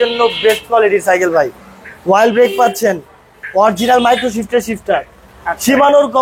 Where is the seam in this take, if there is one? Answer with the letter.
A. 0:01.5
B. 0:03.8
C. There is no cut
C